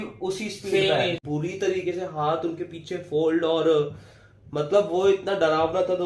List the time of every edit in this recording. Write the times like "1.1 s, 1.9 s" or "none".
1.2 s

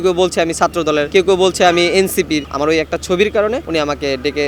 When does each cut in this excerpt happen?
1.1 s, 2.5 s, 3.6 s

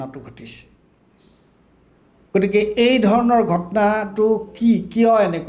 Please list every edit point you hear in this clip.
none

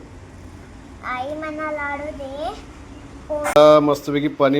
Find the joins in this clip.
3.6 s

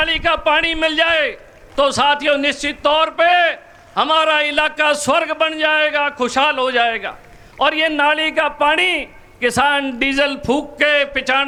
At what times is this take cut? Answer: none

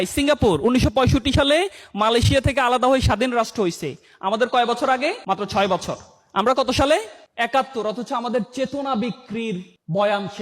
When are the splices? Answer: 5.2 s, 7.2 s

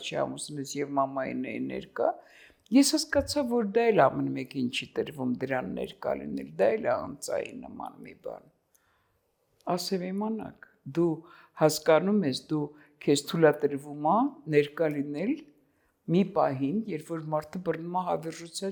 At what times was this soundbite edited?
none

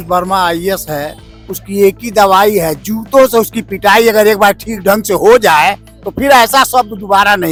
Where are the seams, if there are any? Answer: none

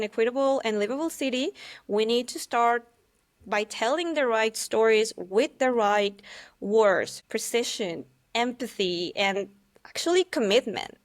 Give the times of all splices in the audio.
7.2 s

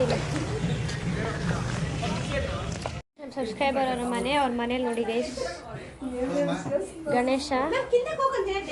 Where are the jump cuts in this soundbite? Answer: none

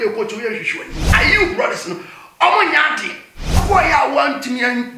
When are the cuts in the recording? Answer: 1.1 s, 3.6 s

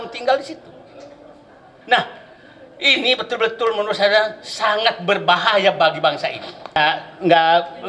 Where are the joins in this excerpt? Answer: 6.8 s

